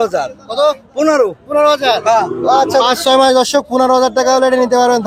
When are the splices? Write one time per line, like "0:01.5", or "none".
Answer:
0:02.8